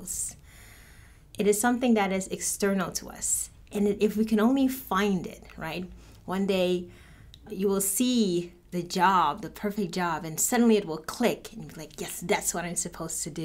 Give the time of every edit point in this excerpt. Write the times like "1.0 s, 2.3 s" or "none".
7.5 s, 8.6 s